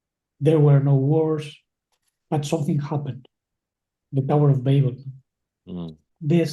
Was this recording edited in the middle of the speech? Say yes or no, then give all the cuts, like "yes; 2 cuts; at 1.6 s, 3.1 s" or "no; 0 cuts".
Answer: yes; 1 cut; at 5.6 s